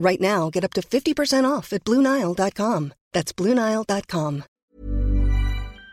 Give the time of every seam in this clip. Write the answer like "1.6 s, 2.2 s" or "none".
4.4 s